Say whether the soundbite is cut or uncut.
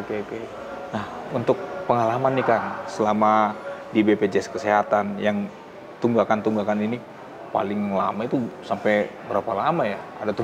uncut